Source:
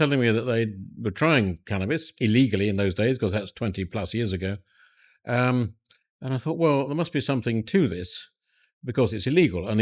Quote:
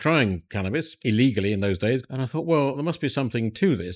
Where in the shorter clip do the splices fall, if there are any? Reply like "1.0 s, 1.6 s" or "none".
2.0 s